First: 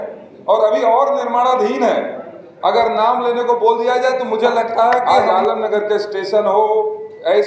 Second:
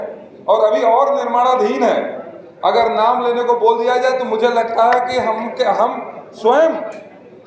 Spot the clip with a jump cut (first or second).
first